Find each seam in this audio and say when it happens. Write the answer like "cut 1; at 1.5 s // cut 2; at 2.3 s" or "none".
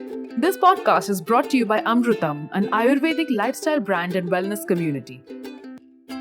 cut 1; at 5.1 s